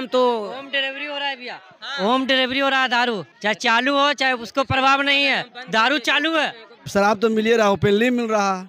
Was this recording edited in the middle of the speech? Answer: yes; 2 cuts; at 3.3 s, 6.7 s

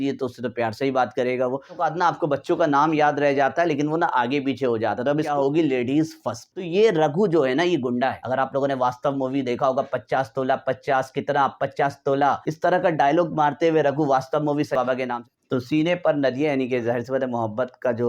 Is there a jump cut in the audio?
yes; 6 cuts; at 1.8 s, 5.3 s, 6.5 s, 8.2 s, 12.5 s, 14.8 s

